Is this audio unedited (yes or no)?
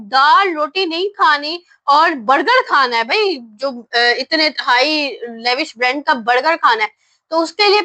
yes